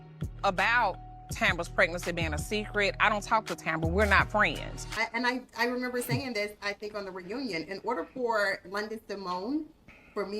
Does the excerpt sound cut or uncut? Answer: cut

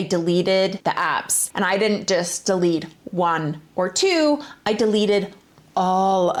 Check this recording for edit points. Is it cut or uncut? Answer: uncut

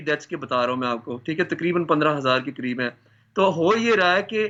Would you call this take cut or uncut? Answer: uncut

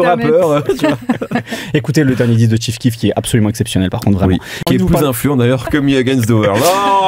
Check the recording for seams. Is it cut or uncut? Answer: cut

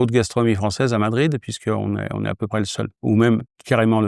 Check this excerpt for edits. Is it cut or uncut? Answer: cut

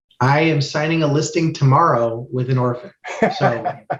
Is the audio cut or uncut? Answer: uncut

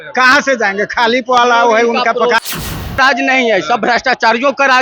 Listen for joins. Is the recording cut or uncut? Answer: cut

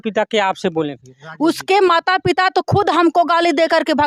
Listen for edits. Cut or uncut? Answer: uncut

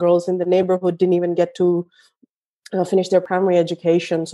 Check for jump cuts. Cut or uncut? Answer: cut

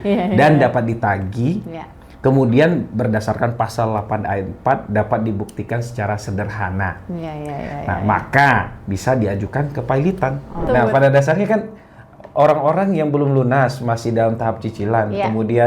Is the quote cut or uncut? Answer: cut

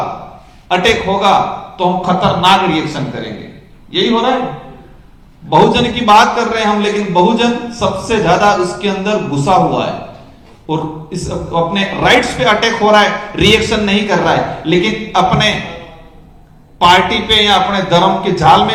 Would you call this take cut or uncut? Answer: uncut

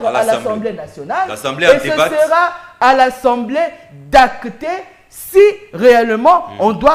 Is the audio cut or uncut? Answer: uncut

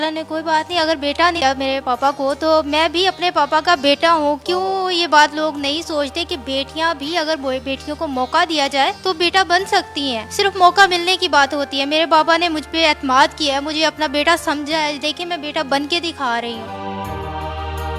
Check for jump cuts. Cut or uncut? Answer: cut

